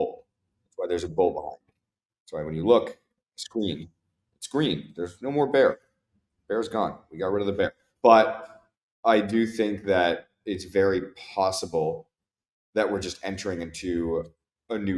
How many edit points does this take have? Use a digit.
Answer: 1